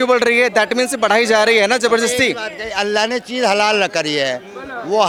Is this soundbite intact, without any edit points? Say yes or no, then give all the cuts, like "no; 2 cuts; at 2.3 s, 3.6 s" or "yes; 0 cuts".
yes; 0 cuts